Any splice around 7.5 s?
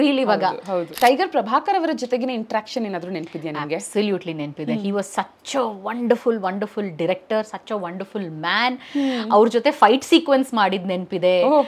no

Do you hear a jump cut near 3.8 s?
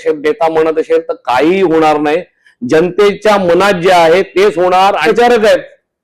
no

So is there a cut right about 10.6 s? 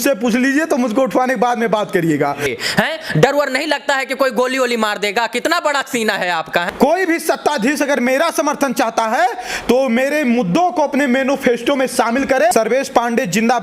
no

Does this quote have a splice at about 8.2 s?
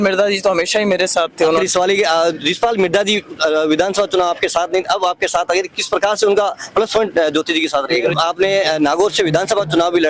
yes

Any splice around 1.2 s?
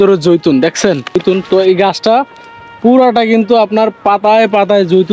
yes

